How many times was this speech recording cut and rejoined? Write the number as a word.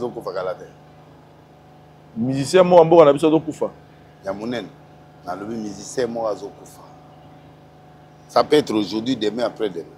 one